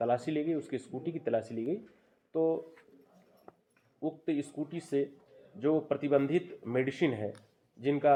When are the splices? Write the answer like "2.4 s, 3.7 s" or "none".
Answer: none

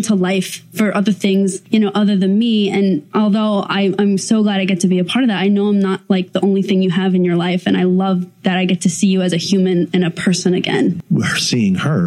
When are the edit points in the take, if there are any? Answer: 1.6 s, 3.0 s, 11.0 s

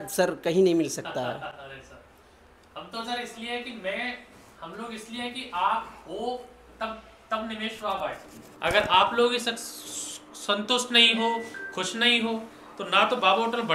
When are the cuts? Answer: none

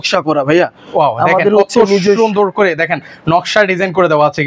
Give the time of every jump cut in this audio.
none

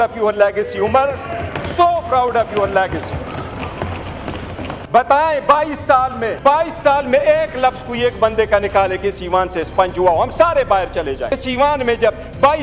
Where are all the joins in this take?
4.7 s, 6.3 s, 11.3 s

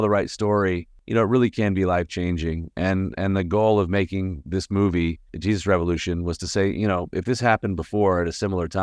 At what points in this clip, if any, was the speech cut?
0.9 s, 5.3 s

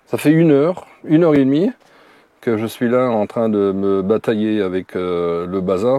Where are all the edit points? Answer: none

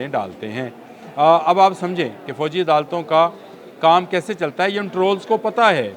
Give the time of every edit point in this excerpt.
none

